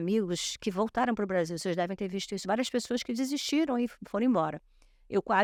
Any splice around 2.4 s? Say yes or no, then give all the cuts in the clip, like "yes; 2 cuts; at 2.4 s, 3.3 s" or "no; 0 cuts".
no; 0 cuts